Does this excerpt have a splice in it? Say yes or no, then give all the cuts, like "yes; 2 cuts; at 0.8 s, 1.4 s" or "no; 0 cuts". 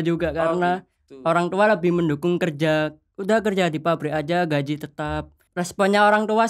yes; 1 cut; at 5.4 s